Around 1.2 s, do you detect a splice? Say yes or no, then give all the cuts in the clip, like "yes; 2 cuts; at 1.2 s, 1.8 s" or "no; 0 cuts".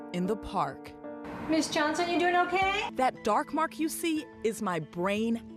no; 1 cut; at 2.8 s